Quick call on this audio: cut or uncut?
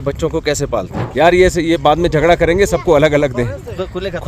cut